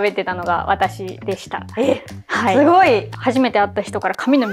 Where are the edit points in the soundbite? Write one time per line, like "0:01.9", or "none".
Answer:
0:03.1